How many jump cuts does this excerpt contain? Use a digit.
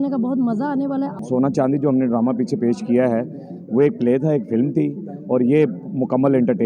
1